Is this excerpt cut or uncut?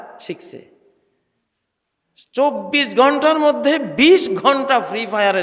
uncut